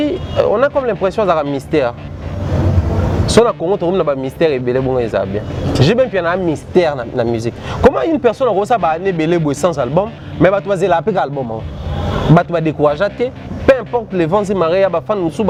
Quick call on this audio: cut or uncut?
uncut